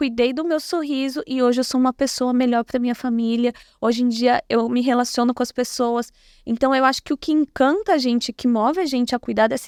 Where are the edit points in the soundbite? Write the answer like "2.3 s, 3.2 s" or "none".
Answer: none

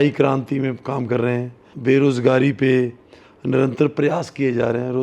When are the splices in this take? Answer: 1.6 s

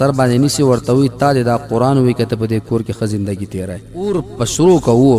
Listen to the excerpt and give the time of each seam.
4.1 s

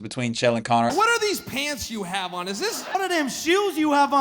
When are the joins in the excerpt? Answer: 0.9 s, 2.9 s

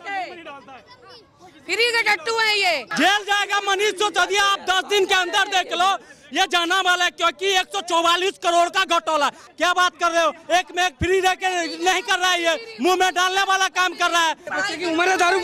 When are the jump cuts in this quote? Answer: 2.9 s, 9.4 s, 14.5 s

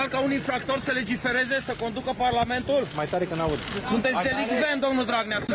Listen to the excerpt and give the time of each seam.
4.4 s

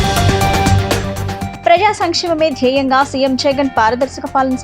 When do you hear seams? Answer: 0.9 s

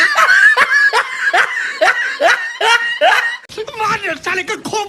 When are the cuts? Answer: 3.5 s

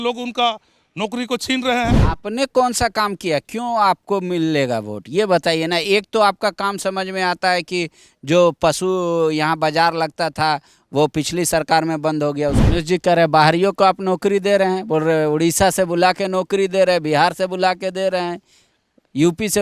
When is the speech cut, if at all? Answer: 2.1 s, 12.6 s

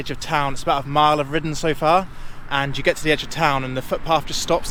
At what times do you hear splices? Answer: none

